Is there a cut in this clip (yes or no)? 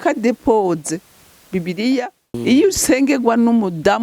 yes